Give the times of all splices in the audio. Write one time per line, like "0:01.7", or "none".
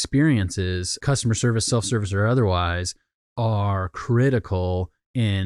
0:01.0